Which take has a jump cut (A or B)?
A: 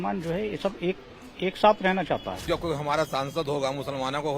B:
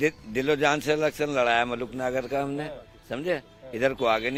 A